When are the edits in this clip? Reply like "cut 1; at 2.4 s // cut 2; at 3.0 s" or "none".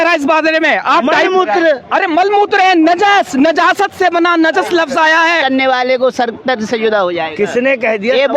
cut 1; at 5.4 s